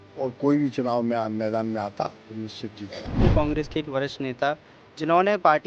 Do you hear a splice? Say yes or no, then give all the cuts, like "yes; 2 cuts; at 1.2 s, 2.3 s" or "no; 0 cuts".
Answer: yes; 1 cut; at 3.2 s